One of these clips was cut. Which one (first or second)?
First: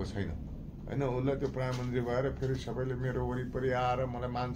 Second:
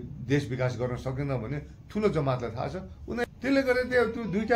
second